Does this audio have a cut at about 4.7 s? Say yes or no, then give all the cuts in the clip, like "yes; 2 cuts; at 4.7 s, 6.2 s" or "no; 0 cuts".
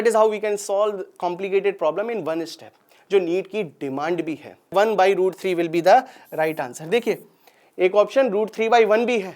yes; 1 cut; at 4.7 s